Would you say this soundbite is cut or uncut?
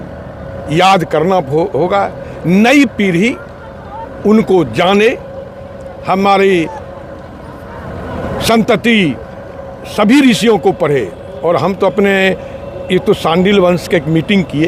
uncut